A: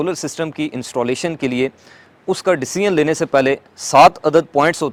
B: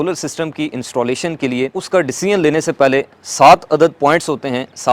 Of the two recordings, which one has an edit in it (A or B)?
B